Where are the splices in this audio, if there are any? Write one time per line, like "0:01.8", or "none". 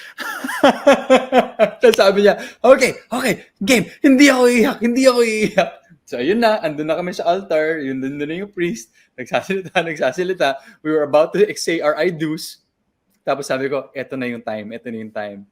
none